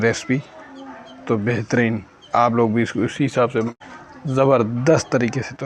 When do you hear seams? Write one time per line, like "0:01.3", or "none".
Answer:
0:03.7

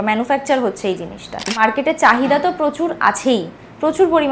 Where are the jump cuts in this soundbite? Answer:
0:01.6

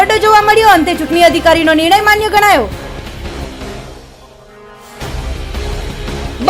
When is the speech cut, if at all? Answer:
none

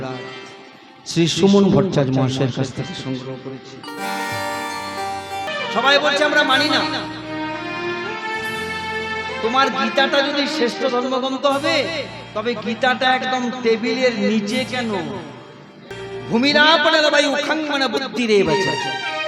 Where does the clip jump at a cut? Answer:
0:05.5
0:16.0

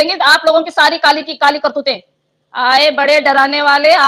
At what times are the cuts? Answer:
none

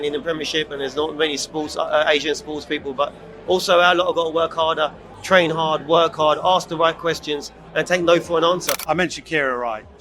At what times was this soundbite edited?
0:05.1
0:08.8

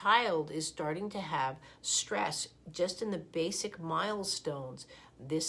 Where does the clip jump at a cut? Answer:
none

